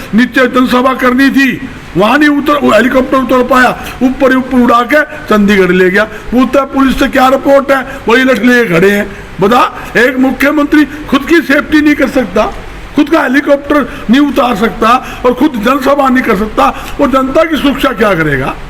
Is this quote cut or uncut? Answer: uncut